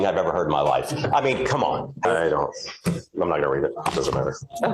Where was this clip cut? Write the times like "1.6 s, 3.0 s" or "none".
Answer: 2.0 s